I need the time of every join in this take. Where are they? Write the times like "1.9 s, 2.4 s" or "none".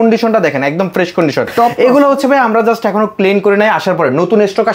none